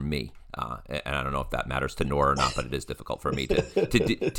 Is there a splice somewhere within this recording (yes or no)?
no